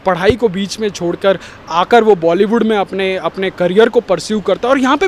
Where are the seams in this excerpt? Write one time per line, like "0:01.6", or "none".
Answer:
none